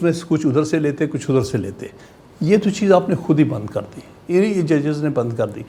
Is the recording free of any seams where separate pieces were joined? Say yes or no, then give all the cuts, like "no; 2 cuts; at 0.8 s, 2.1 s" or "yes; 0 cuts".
yes; 0 cuts